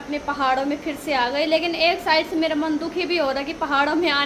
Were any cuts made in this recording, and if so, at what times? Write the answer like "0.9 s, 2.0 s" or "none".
none